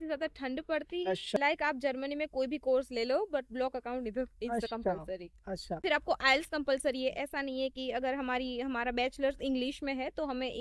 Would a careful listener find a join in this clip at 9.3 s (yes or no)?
no